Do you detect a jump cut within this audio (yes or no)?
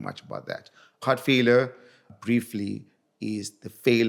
yes